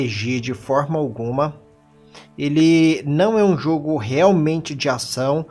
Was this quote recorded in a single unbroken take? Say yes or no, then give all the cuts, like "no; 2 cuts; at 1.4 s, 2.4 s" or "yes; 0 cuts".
no; 1 cut; at 2.8 s